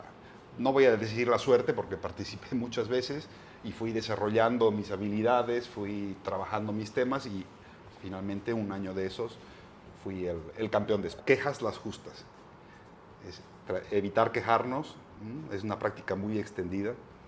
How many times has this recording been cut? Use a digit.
1